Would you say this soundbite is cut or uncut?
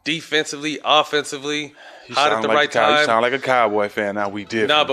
uncut